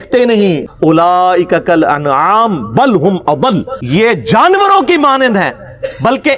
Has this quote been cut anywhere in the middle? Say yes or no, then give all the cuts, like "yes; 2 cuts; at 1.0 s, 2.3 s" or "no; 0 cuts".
yes; 2 cuts; at 1.0 s, 3.8 s